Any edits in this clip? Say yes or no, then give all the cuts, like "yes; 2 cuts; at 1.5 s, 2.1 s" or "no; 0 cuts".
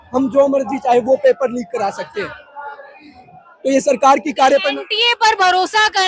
no; 0 cuts